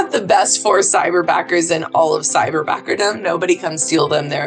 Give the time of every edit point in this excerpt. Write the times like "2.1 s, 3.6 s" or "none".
none